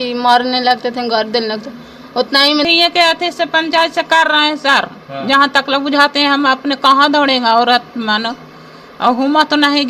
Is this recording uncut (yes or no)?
no